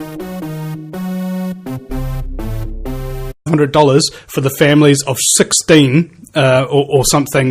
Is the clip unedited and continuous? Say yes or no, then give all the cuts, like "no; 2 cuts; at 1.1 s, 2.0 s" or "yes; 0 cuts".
no; 1 cut; at 3.3 s